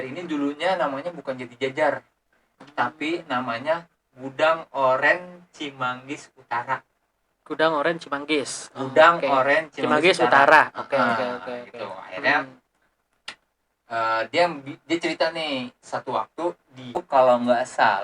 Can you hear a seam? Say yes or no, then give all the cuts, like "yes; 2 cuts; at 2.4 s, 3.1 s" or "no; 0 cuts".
yes; 1 cut; at 17.0 s